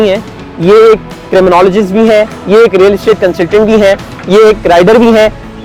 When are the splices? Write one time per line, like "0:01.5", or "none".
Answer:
none